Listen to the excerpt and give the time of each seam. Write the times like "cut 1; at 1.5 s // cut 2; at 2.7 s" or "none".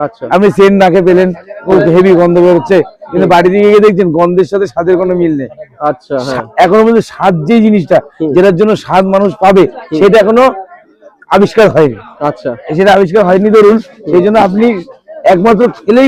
none